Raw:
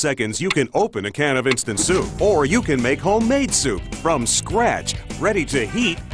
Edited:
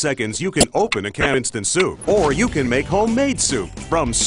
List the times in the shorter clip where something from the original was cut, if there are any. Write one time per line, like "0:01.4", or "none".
0:01.3